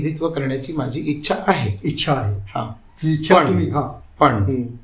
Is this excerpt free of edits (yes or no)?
yes